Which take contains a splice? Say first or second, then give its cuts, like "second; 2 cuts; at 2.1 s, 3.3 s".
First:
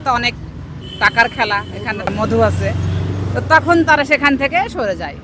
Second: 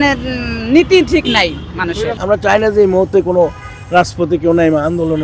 second; 1 cut; at 2.1 s